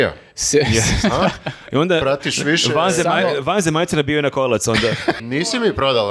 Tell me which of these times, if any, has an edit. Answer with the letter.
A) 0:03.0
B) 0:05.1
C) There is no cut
B